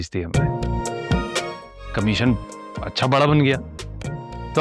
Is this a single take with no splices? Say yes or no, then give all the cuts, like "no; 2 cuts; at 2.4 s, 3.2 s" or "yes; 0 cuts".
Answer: no; 1 cut; at 1.7 s